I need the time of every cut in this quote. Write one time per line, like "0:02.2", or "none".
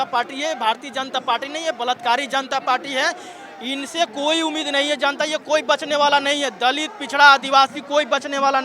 none